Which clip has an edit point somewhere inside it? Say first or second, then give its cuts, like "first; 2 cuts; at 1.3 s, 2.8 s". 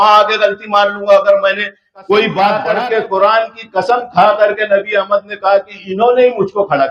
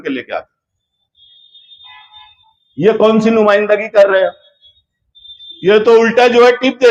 first; 1 cut; at 2.7 s